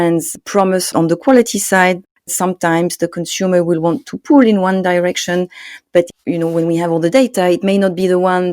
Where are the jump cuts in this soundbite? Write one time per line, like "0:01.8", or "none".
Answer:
0:02.3

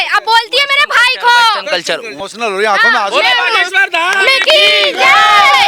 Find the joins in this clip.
0:02.1

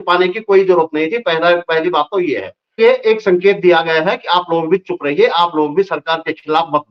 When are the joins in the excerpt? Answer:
0:02.8

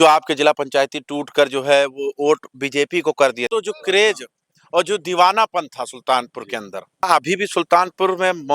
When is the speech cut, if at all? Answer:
0:03.5
0:07.0

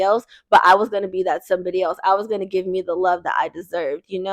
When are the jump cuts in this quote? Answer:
none

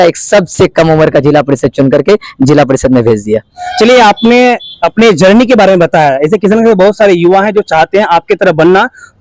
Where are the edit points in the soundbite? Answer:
none

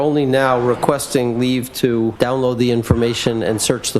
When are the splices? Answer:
0:02.1

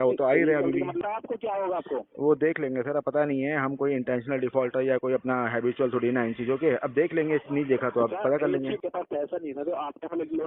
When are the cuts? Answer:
0:01.0
0:08.8

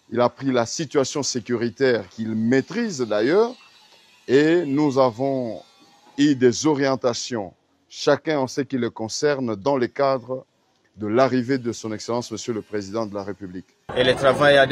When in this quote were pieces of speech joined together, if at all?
0:13.8

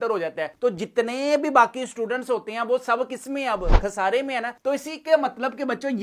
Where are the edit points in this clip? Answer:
none

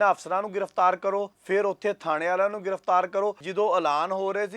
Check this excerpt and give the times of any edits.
0:01.4
0:03.4

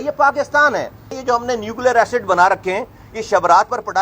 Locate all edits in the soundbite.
0:01.2

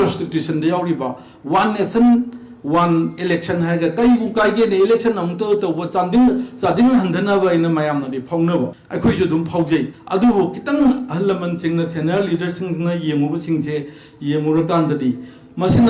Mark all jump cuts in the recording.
0:08.8
0:10.0

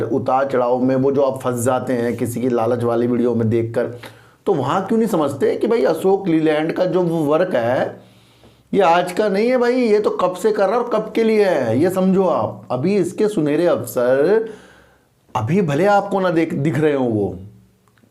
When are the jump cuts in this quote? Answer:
none

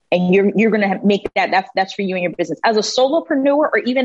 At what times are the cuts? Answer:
none

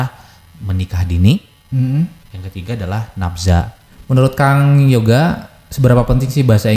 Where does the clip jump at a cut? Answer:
0:03.8

